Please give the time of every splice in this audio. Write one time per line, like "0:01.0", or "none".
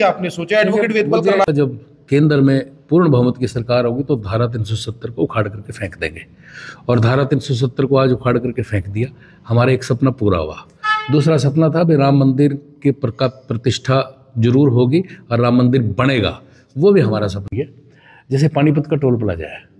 0:01.4
0:17.5